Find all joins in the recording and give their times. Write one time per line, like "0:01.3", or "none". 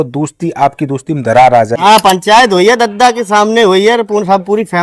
0:01.8